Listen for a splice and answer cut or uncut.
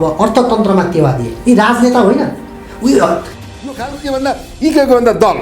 cut